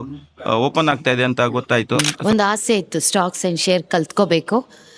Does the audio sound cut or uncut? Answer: cut